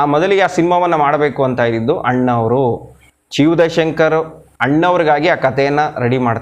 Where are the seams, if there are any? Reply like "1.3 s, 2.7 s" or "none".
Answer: none